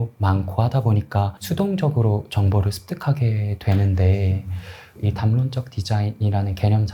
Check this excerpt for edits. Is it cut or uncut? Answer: cut